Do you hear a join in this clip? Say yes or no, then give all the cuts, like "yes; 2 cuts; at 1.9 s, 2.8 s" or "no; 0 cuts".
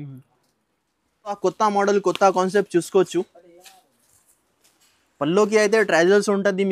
yes; 1 cut; at 1.4 s